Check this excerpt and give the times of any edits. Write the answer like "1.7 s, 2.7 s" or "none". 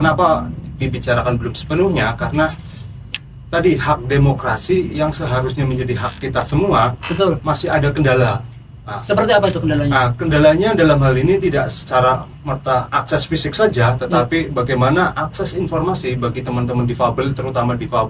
none

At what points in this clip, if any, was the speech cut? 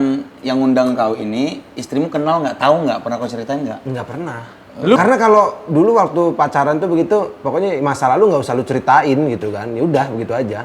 5.0 s

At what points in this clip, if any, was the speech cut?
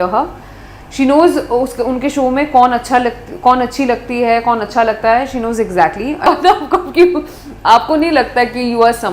6.3 s

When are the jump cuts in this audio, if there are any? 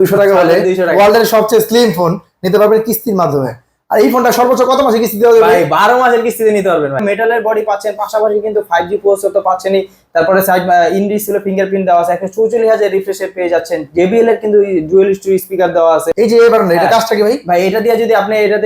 7.0 s, 16.1 s

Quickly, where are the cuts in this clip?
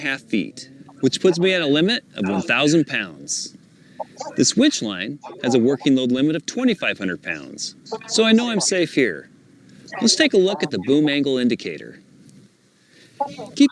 8.9 s

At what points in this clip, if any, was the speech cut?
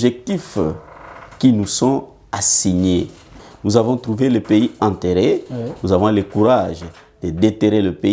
3.4 s

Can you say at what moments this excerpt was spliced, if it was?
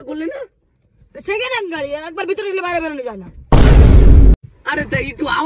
4.3 s

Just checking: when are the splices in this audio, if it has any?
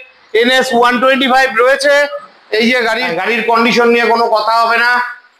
3.0 s

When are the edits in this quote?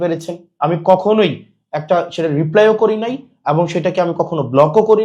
none

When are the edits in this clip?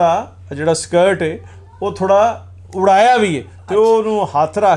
none

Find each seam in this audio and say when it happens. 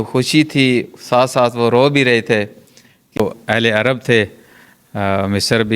3.2 s

